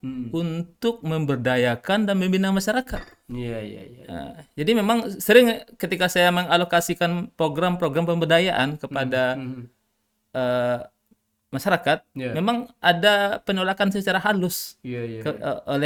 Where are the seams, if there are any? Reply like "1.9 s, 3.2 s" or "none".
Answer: none